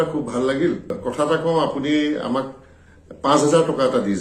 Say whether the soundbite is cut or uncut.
cut